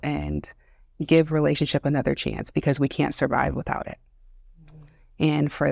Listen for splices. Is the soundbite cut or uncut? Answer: uncut